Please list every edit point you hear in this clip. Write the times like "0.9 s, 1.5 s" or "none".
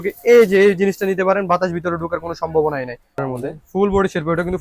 3.2 s